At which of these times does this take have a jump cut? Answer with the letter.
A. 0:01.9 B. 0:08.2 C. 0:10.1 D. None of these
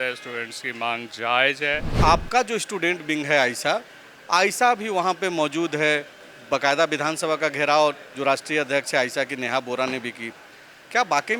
A